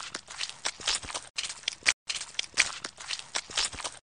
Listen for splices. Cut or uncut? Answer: uncut